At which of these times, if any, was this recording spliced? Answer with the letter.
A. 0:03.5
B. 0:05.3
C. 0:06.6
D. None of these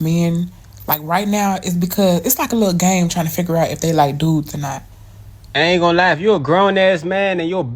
B